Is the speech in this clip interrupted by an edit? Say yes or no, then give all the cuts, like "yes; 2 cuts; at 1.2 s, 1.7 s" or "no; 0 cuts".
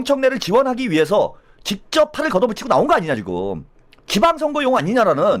no; 0 cuts